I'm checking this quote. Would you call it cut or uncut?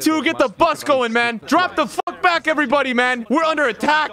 cut